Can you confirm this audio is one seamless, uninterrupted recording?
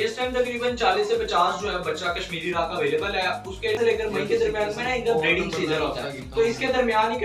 no; 1 cut; at 3.8 s

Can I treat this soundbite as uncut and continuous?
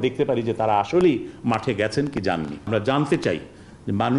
no; 1 cut; at 2.7 s

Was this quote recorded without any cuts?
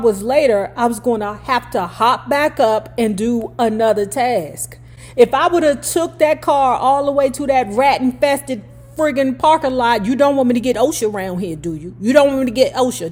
yes; 0 cuts

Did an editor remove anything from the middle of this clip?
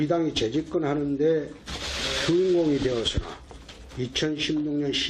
yes; 1 cut; at 2.6 s

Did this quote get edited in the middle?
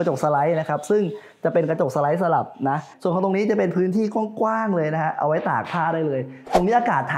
yes; 1 cut; at 2.9 s

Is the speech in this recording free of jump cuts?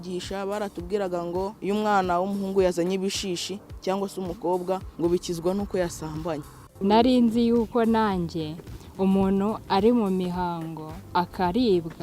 no; 3 cuts; at 1.6 s, 4.9 s, 6.6 s

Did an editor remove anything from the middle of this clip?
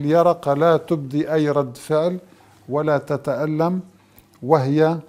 no; 0 cuts

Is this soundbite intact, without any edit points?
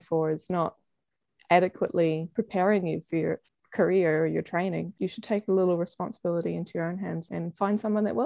no; 4 cuts; at 2.3 s, 3.5 s, 4.9 s, 7.2 s

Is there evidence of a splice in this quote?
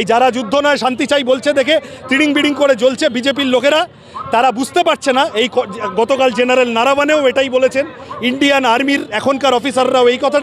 no; 0 cuts

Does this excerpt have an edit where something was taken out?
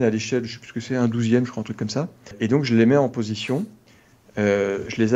yes; 1 cut; at 2.4 s

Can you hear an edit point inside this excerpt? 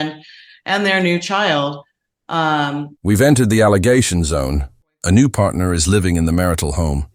no; 0 cuts

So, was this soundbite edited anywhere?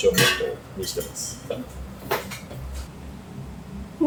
no; 0 cuts

